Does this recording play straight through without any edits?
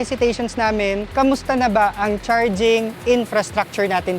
no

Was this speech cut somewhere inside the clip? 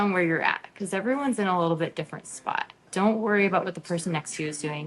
yes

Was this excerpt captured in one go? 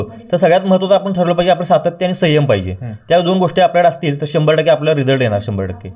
yes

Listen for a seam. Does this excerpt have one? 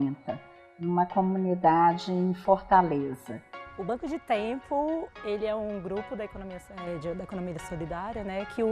yes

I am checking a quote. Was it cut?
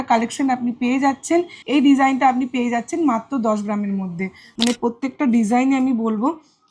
yes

